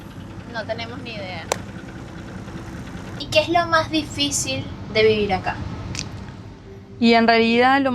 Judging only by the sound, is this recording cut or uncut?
cut